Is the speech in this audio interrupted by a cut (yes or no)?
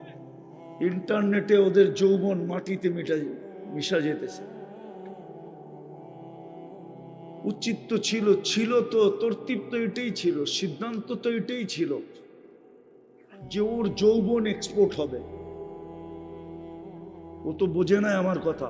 yes